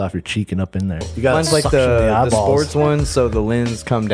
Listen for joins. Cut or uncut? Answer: cut